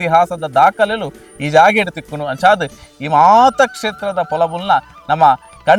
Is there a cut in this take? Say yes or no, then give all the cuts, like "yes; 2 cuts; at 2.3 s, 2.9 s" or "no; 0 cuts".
no; 0 cuts